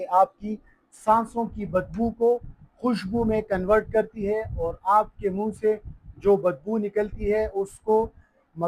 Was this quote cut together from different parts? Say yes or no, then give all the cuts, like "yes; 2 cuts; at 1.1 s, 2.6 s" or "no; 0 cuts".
no; 0 cuts